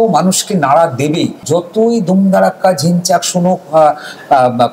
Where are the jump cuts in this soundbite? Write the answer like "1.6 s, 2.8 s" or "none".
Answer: 1.4 s